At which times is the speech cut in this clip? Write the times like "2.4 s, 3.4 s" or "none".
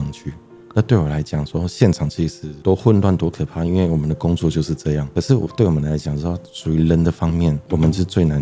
none